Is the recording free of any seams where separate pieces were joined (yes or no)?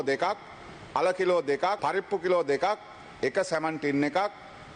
no